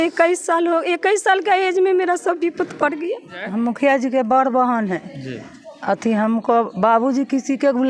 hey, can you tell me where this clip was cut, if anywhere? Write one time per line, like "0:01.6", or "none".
0:03.4